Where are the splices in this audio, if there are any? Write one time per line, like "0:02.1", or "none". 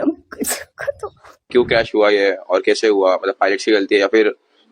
0:01.5